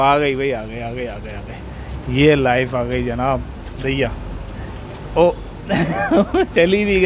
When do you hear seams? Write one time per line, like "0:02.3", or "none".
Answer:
none